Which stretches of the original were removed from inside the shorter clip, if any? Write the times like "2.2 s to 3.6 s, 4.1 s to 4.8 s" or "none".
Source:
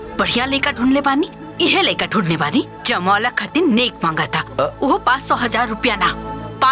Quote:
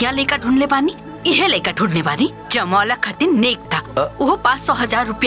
4.0 s to 4.2 s